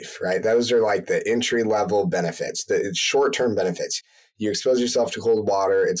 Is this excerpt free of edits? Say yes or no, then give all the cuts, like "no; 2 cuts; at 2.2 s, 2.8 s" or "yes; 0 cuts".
yes; 0 cuts